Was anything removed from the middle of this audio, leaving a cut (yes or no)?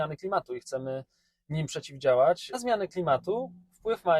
yes